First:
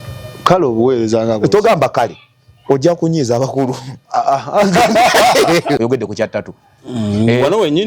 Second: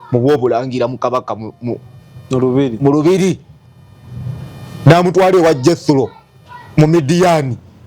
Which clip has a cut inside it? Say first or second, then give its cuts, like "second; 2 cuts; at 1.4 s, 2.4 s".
first; 1 cut; at 5.8 s